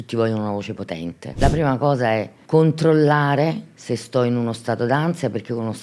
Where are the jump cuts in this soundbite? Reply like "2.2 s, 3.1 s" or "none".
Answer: 1.4 s, 2.4 s